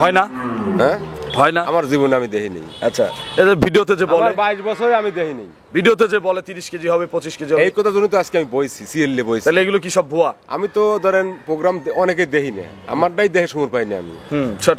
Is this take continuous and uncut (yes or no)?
yes